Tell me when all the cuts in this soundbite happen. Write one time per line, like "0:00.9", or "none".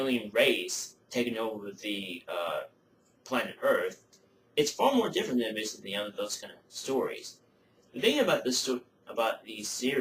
0:05.5